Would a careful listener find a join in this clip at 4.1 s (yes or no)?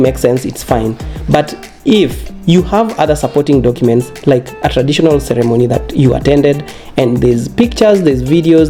no